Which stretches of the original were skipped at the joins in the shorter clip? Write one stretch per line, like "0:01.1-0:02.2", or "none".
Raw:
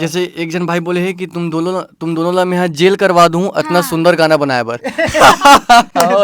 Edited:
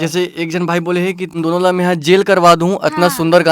0:01.3-0:02.0